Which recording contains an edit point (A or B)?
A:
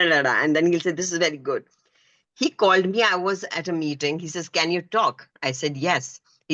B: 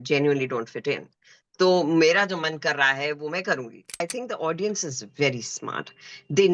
B